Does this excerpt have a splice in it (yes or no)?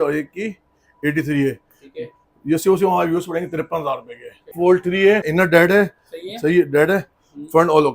yes